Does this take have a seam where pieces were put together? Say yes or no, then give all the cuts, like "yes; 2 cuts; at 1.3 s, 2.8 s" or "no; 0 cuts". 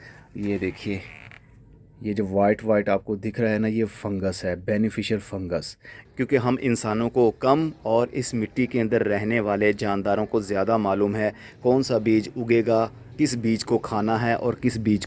yes; 1 cut; at 6.0 s